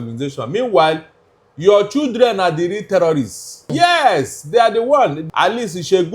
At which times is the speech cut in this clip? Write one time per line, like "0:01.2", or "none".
0:03.7
0:05.2